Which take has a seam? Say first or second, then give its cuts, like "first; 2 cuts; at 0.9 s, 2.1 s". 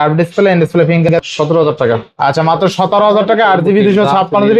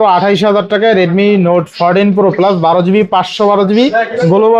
first; 1 cut; at 1.1 s